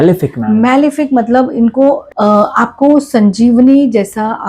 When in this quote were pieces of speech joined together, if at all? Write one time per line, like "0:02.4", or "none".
0:02.1